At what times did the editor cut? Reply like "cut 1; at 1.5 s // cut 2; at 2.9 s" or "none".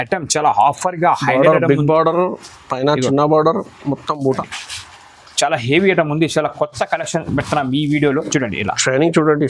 cut 1; at 4.5 s